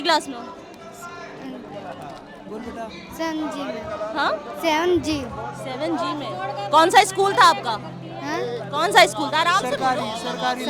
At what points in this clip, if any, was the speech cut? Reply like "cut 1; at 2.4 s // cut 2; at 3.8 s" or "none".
none